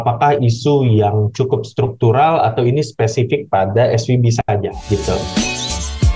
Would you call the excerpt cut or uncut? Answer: cut